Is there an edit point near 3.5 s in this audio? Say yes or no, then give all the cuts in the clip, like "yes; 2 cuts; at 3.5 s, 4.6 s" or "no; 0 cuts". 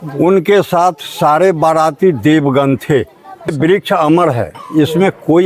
yes; 1 cut; at 3.5 s